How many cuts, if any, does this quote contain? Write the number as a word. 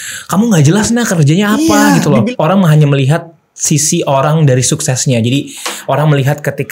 one